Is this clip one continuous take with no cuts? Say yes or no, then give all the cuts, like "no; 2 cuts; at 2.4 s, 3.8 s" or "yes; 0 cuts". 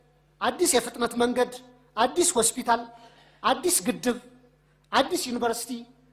yes; 0 cuts